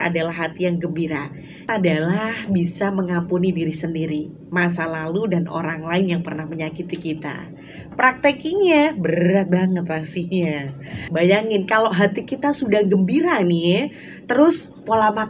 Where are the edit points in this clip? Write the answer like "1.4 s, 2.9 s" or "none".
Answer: 1.7 s, 10.8 s